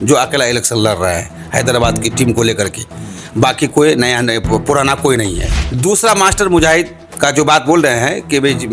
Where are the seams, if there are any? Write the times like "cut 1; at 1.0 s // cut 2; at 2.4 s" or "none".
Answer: cut 1; at 5.6 s